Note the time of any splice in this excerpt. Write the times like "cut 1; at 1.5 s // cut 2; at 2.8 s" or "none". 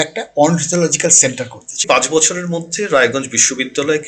cut 1; at 1.8 s